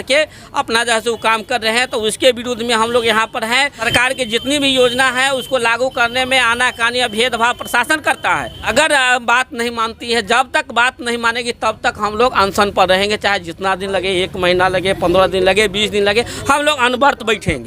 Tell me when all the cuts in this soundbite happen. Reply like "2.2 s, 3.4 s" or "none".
3.9 s, 8.6 s